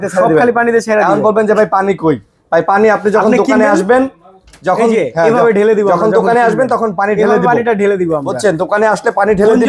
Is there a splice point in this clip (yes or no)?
no